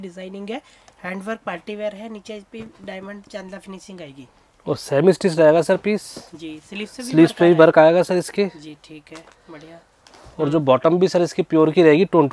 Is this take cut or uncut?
uncut